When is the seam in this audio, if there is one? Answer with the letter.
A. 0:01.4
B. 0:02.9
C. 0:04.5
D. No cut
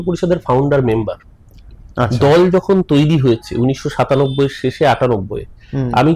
D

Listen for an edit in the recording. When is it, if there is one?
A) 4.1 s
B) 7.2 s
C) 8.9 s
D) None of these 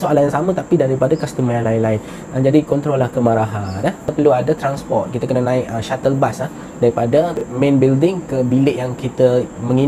A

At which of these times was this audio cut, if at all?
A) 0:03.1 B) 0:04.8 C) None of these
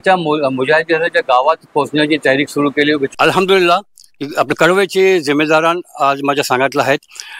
A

